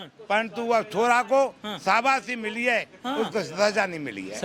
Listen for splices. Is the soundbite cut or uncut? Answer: uncut